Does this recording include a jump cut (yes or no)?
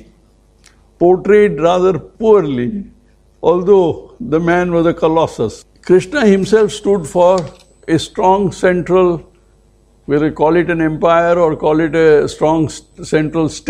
yes